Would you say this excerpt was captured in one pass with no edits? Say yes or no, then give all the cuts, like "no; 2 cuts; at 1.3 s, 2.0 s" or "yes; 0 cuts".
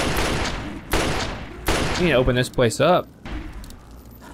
no; 1 cut; at 3.2 s